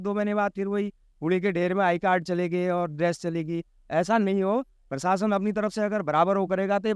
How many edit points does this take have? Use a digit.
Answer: 0